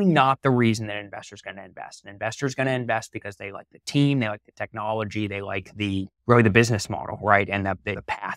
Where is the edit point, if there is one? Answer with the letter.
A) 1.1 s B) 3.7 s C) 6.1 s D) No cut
C